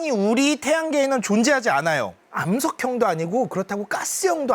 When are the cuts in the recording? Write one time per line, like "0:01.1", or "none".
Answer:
0:02.2